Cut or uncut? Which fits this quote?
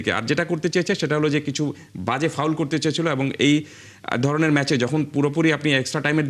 uncut